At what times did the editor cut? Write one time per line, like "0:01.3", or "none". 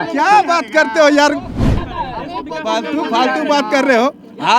0:01.7